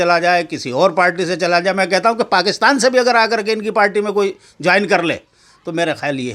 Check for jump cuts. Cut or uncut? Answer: uncut